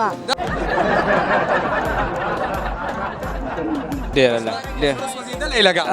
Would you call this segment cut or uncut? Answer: cut